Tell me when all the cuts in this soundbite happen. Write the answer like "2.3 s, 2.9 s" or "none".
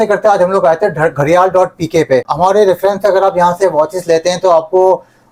none